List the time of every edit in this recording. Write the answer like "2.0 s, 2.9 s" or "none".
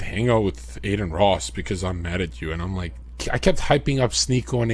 3.0 s

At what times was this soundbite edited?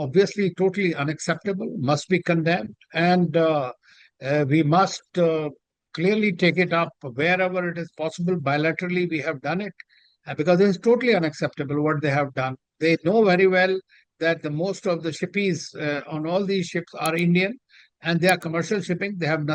none

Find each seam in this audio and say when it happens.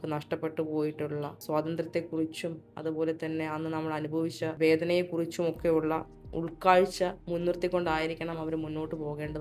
1.4 s, 4.5 s, 7.2 s

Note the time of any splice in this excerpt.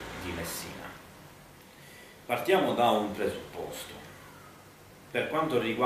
3.8 s

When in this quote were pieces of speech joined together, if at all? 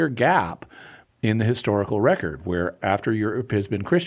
2.8 s

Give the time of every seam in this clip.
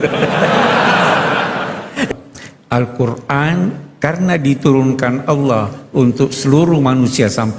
2.1 s

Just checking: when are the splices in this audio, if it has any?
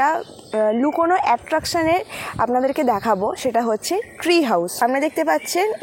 4.7 s

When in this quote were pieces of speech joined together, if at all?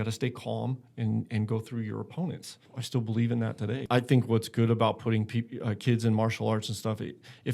2.7 s, 3.8 s

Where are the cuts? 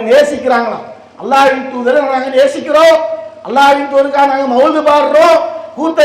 none

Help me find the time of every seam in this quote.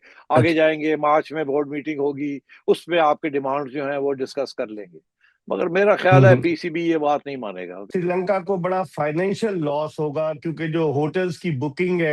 7.7 s

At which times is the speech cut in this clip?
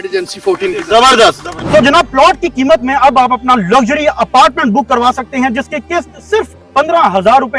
1.6 s

